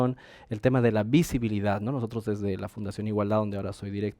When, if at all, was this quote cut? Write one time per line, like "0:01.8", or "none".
none